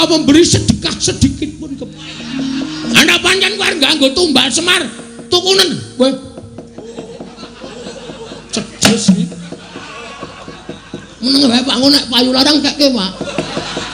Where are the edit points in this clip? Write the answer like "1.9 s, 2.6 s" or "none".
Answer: 2.9 s